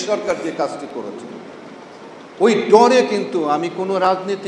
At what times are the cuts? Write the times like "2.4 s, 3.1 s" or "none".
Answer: none